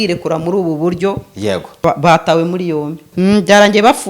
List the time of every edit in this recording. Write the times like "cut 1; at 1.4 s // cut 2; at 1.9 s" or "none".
cut 1; at 1.8 s // cut 2; at 3.0 s

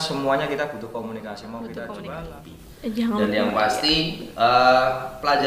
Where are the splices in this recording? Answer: cut 1; at 2.3 s

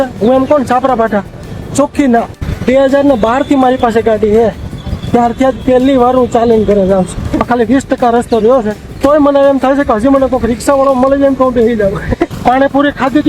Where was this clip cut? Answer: cut 1; at 2.4 s // cut 2; at 7.4 s // cut 3; at 9.0 s // cut 4; at 12.3 s

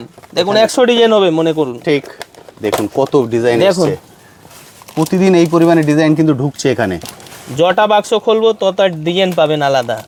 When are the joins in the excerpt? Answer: none

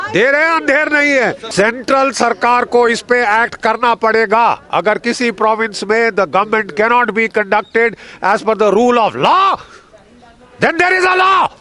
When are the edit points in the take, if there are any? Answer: cut 1; at 1.4 s

